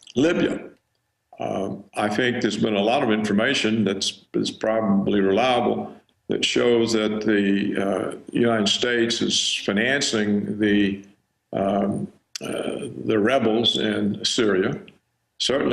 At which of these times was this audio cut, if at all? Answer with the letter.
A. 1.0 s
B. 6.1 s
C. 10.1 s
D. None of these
A